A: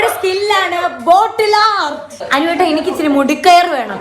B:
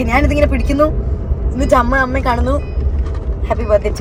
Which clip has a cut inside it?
A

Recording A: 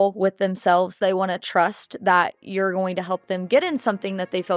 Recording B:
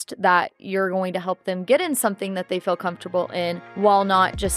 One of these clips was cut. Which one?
B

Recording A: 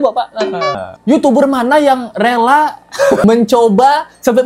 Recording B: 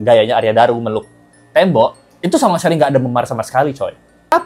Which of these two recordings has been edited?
A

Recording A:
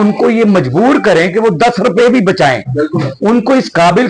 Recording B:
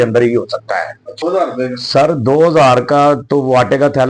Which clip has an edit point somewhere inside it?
B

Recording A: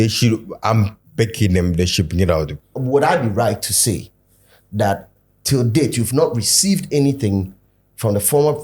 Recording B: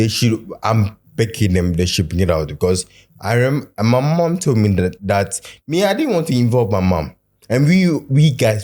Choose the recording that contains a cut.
A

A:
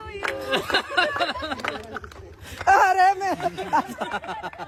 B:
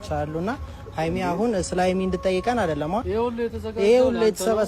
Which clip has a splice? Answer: B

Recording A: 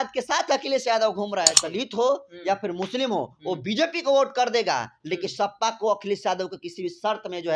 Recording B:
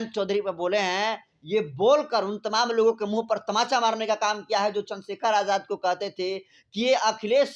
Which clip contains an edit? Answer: A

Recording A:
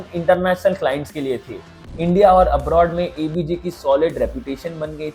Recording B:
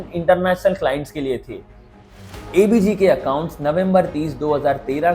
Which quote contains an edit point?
B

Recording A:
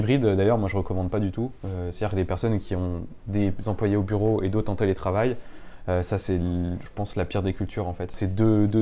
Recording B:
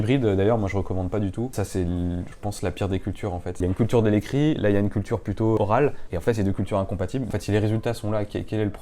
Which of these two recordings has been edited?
B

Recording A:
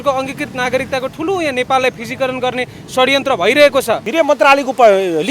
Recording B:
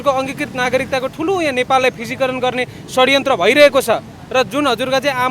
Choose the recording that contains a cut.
A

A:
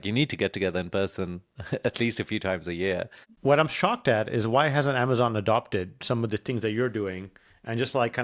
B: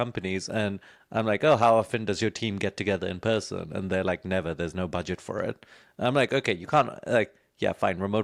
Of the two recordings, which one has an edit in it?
A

